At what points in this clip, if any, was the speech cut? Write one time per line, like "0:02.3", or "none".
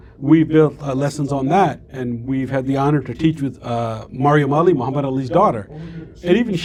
none